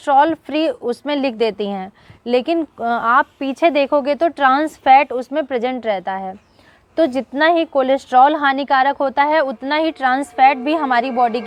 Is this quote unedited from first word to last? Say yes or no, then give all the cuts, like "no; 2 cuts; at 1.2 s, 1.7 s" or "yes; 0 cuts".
yes; 0 cuts